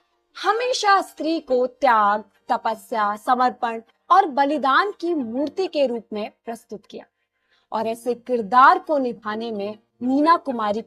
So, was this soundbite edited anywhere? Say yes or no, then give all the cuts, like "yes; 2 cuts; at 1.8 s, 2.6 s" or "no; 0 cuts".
no; 0 cuts